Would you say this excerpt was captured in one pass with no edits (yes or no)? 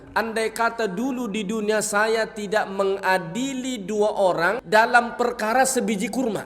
no